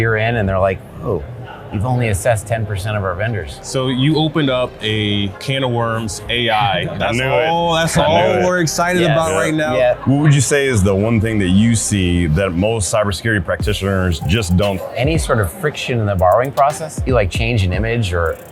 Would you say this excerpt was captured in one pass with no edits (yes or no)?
no